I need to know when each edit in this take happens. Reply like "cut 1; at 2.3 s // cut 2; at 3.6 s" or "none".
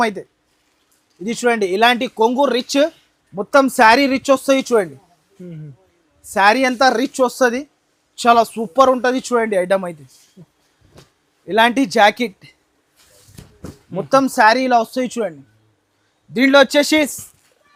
none